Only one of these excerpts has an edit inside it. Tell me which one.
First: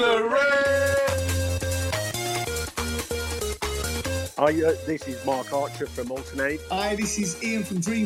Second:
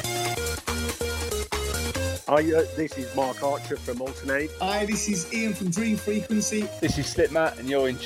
first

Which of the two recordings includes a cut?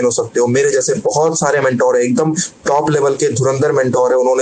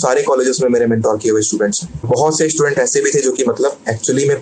second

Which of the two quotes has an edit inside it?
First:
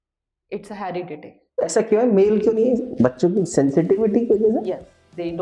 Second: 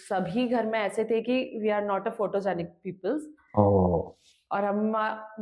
first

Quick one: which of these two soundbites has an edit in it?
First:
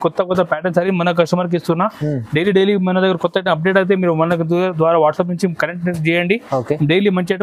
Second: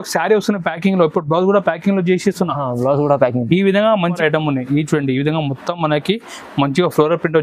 second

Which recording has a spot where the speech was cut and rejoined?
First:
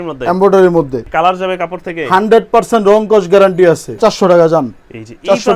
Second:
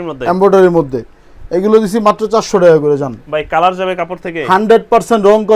first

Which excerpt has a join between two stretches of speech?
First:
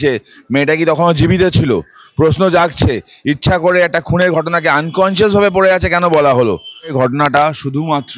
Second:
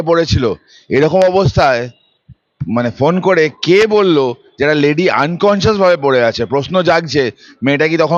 first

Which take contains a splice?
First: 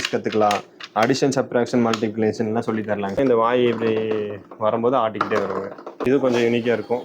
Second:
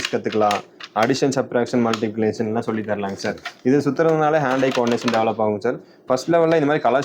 first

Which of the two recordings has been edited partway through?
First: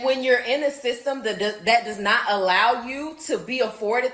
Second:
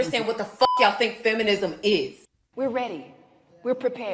second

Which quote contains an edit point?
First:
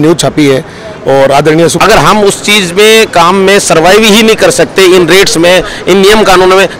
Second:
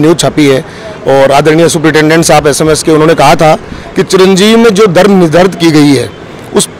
first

